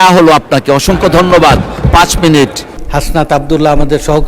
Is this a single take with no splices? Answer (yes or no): no